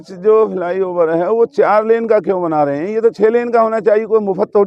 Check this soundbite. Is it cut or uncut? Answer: uncut